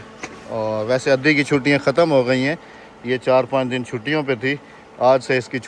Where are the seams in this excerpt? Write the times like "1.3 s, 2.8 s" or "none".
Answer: none